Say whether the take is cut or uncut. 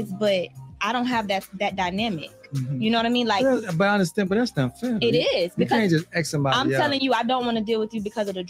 uncut